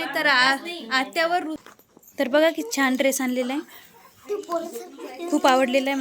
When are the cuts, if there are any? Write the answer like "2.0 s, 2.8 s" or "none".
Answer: 1.6 s